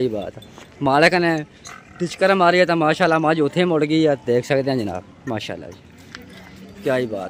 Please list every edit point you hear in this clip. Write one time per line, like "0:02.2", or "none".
none

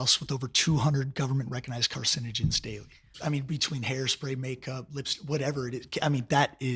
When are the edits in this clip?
0:03.2

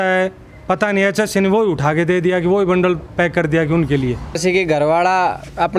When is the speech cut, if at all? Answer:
0:04.4

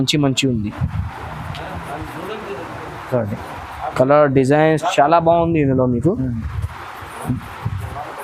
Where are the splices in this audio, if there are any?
none

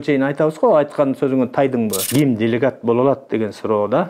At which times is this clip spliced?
0:02.1

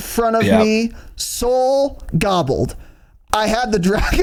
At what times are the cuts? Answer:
none

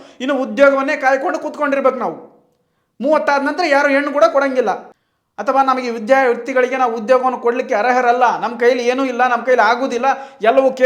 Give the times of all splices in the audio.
0:04.9

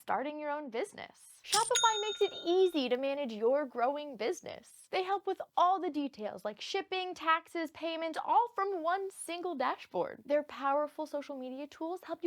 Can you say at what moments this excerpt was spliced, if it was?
0:01.3
0:10.1

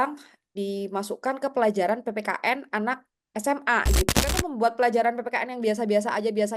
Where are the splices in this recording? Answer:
0:04.1

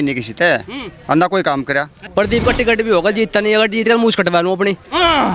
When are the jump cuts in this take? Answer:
0:02.0

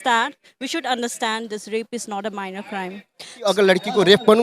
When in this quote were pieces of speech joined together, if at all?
0:03.5

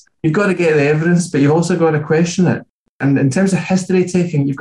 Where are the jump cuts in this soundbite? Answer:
0:03.0

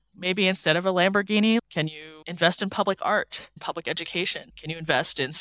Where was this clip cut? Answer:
0:01.6
0:03.6
0:04.5

